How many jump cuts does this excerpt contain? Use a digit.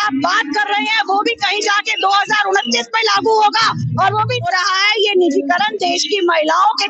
1